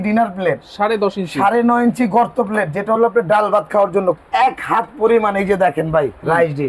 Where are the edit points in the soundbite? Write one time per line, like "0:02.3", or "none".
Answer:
0:04.2